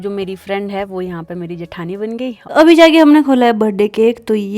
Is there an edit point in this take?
yes; 1 cut; at 2.4 s

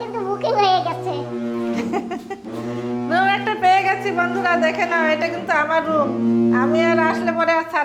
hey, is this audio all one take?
yes; 0 cuts

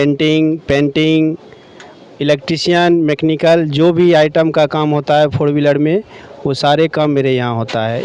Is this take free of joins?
yes; 0 cuts

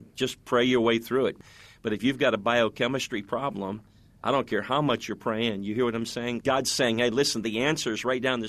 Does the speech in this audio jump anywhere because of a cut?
yes; 2 cuts; at 1.4 s, 6.4 s

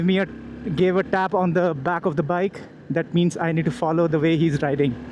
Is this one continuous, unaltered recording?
yes; 0 cuts

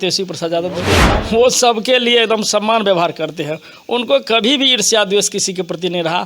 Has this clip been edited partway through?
yes; 1 cut; at 1.0 s

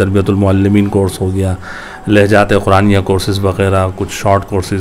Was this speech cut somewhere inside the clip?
no; 0 cuts

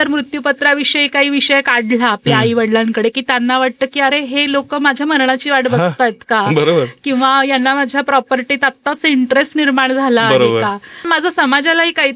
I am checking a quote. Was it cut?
yes; 1 cut; at 10.9 s

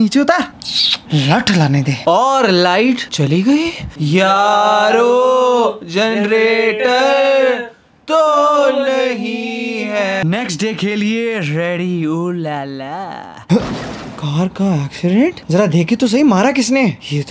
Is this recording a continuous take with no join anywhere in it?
yes; 0 cuts

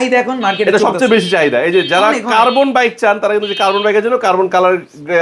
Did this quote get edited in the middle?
no; 0 cuts

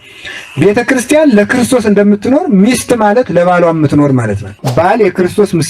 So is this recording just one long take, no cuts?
no; 1 cut; at 4.6 s

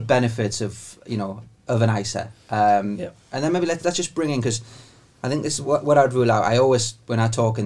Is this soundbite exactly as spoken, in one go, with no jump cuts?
yes; 0 cuts

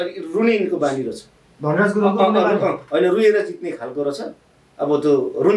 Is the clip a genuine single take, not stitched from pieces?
yes; 0 cuts

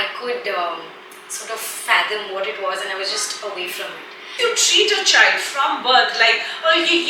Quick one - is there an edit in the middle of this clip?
yes; 1 cut; at 4.4 s

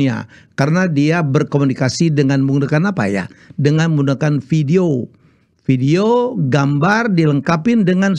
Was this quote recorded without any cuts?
yes; 0 cuts

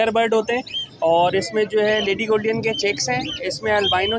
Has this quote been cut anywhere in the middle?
no; 0 cuts

